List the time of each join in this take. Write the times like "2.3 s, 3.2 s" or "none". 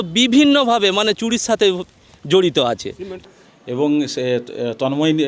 3.2 s